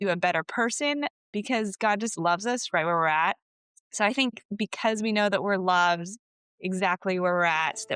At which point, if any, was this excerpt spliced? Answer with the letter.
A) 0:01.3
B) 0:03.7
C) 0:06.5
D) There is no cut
A